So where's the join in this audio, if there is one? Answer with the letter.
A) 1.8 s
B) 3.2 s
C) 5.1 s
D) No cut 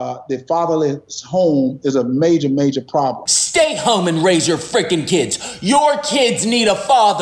B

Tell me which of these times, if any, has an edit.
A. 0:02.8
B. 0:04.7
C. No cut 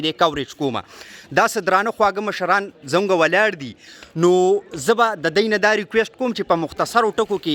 C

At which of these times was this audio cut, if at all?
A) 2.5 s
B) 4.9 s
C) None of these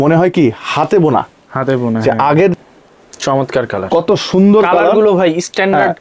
A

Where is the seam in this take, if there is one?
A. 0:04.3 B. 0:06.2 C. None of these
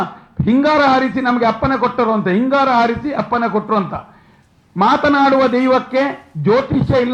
C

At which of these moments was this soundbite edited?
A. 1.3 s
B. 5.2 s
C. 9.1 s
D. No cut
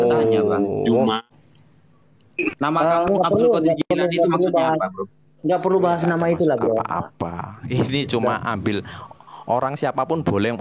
A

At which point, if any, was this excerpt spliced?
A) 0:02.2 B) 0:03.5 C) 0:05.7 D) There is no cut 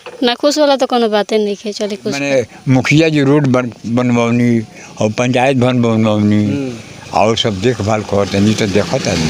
A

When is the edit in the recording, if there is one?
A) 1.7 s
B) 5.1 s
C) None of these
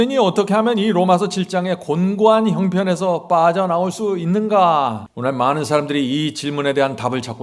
B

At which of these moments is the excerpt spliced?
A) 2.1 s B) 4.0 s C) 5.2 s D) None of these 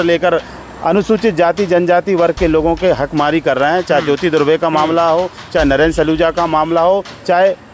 D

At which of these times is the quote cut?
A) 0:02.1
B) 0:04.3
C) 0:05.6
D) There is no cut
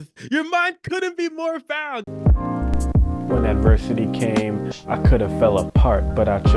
A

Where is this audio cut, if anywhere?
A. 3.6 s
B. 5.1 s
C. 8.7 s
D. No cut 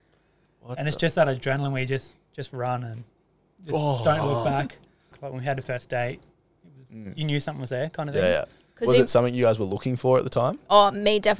B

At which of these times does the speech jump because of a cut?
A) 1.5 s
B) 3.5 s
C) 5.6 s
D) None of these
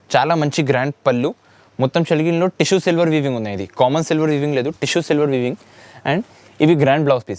D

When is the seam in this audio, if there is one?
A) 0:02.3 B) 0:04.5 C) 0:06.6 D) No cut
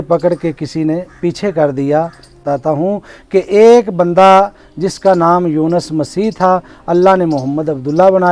A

